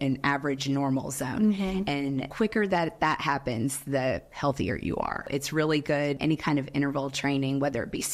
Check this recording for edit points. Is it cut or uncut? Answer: cut